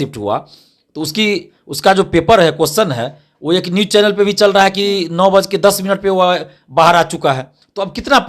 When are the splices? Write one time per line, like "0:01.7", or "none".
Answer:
none